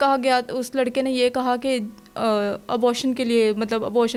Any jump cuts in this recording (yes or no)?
no